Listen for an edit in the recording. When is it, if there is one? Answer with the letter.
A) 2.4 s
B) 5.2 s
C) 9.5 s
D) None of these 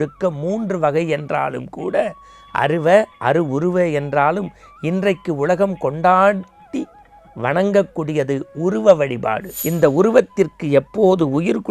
C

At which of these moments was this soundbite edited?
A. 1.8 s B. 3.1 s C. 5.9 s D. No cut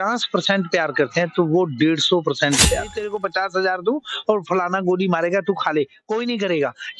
B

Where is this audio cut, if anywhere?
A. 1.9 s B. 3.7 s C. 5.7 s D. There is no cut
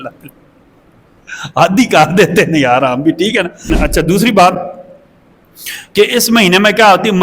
B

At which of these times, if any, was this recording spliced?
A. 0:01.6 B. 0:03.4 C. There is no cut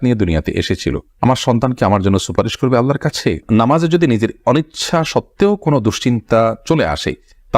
B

